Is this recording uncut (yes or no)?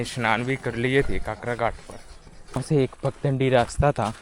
no